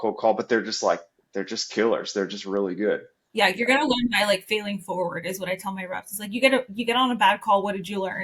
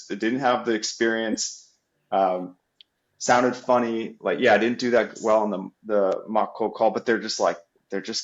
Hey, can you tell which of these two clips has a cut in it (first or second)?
first